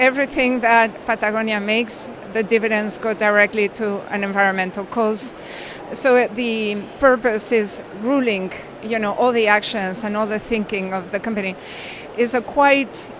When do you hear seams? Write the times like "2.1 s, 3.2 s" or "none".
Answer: 5.8 s, 6.9 s, 12.1 s